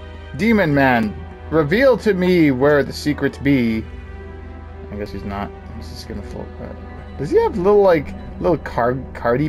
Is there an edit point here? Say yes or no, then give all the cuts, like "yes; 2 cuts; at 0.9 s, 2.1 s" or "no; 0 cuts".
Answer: no; 0 cuts